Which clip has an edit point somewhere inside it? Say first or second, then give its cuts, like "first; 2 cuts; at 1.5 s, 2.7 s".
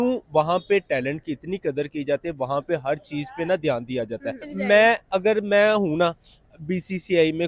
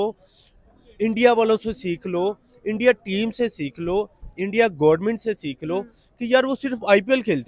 first; 1 cut; at 4.5 s